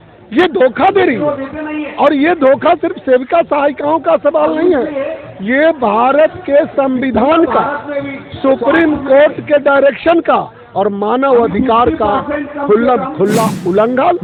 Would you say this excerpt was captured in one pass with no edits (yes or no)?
yes